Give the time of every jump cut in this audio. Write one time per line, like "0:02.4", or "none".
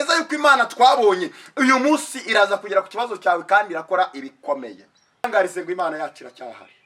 0:05.3